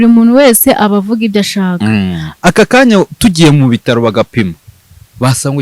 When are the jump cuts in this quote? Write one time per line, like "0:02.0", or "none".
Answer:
0:02.3